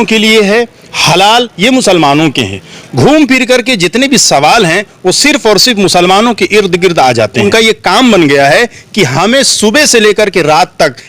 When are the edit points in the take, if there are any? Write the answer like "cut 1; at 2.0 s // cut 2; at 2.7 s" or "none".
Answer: cut 1; at 7.4 s